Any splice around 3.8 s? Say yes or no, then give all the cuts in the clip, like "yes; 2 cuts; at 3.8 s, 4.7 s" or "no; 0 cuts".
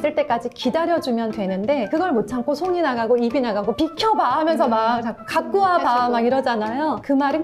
yes; 1 cut; at 3.8 s